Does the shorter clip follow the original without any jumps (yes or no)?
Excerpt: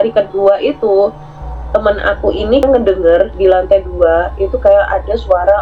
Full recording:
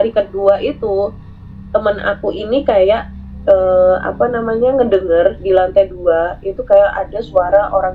no